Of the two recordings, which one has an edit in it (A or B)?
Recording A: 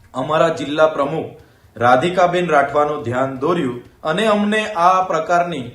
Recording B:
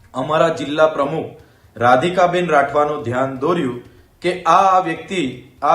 A